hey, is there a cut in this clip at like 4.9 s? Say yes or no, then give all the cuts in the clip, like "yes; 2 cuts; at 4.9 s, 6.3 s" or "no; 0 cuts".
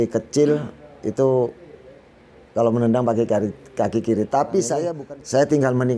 yes; 1 cut; at 4.9 s